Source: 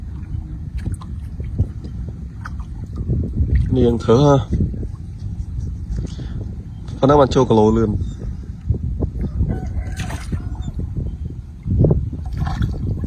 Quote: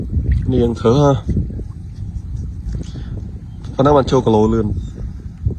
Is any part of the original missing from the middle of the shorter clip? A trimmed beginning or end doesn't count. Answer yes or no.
no